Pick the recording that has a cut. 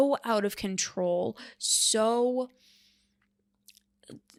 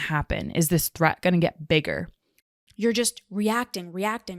second; 1 cut; at 2.7 s

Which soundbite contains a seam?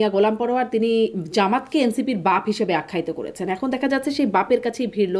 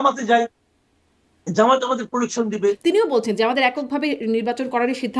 second; 1 cut; at 2.8 s

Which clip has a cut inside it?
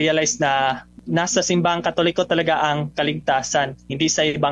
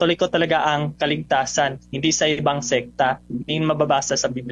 first; 1 cut; at 0.9 s

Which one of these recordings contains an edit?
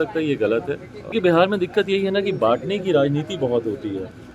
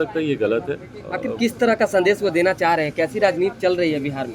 first; 1 cut; at 0.9 s

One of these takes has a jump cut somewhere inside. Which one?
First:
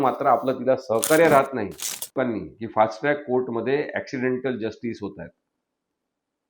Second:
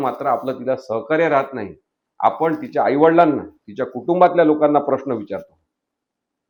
first; 1 cut; at 2.1 s

